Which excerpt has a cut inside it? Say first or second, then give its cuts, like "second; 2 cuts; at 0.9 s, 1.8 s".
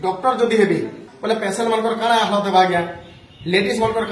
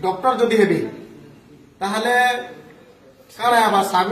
first; 1 cut; at 1.1 s